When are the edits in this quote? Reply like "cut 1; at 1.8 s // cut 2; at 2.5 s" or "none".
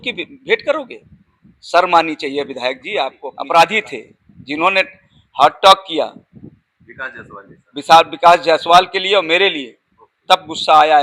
cut 1; at 3.3 s